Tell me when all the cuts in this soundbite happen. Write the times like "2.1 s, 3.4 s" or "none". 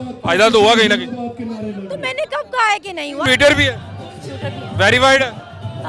3.2 s